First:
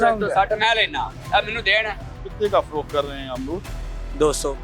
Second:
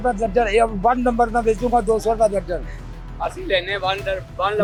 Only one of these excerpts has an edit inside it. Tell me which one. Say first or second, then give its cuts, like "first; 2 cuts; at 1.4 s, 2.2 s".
first; 1 cut; at 2.1 s